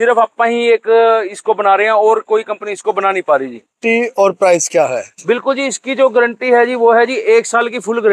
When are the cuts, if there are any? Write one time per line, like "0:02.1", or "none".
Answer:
0:03.8